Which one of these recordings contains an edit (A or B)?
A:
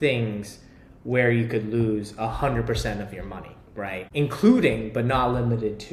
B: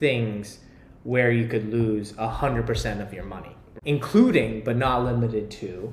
B